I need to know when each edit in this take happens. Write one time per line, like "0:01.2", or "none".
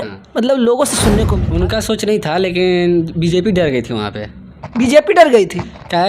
0:01.4